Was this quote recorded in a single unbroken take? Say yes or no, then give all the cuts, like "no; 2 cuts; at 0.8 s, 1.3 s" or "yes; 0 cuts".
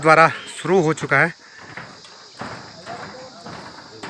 yes; 0 cuts